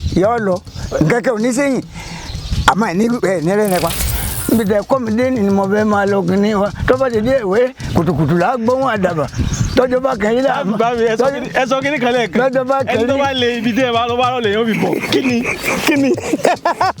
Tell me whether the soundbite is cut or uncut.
cut